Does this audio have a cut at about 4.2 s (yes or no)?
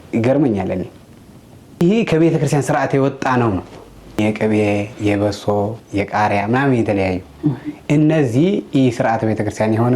yes